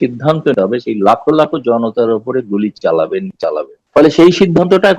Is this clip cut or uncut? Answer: cut